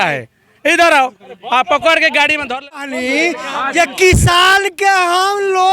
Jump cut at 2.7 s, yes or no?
yes